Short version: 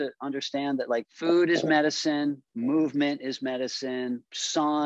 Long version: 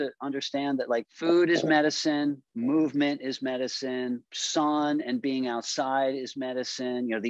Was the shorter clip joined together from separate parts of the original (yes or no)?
no